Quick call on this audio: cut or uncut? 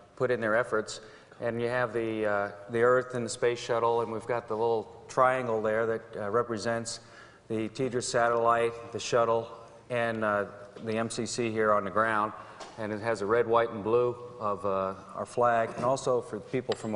cut